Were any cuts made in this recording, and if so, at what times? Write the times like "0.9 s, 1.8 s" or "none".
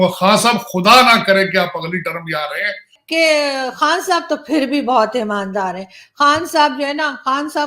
2.9 s